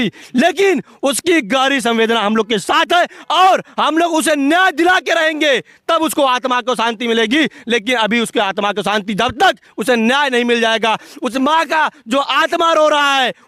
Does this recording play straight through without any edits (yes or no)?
yes